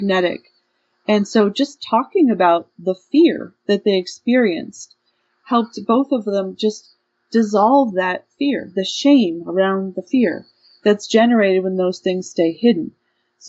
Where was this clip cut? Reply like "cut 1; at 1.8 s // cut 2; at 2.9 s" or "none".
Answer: none